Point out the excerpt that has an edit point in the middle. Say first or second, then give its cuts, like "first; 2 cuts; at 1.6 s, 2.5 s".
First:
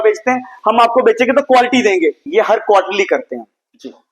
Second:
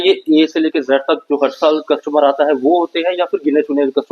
first; 1 cut; at 2.2 s